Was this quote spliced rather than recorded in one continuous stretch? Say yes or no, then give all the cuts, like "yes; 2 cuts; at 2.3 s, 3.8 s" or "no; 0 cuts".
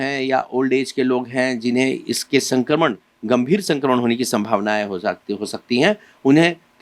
no; 0 cuts